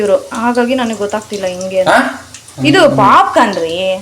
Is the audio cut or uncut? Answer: uncut